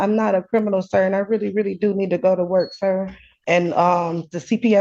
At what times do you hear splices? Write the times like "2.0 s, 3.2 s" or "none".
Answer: 3.4 s